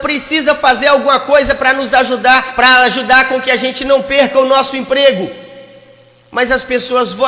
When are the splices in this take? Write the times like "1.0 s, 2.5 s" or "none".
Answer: 2.5 s